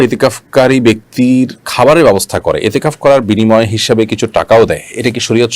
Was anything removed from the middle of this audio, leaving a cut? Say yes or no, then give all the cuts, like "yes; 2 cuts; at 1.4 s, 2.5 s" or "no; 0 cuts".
yes; 1 cut; at 1.1 s